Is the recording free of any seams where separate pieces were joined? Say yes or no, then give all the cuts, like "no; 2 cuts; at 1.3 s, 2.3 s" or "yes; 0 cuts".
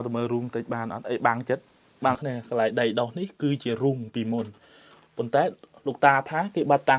no; 1 cut; at 2.2 s